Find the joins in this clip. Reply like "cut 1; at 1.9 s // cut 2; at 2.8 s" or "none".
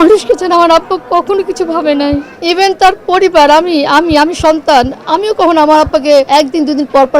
cut 1; at 2.3 s // cut 2; at 6.3 s